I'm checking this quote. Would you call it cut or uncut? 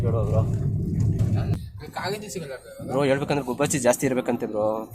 cut